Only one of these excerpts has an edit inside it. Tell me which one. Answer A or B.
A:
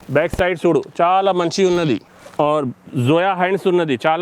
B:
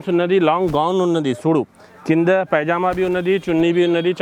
A